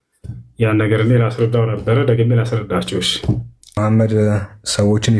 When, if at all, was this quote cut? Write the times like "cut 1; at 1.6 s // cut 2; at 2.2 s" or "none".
cut 1; at 3.8 s